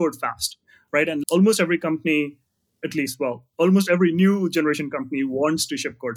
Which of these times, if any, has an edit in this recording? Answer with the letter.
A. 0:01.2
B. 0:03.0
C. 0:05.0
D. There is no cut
A